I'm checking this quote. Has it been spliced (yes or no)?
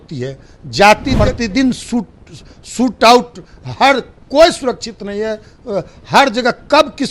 yes